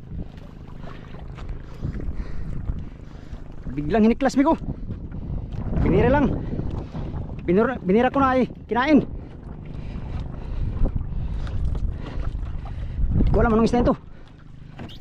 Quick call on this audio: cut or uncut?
uncut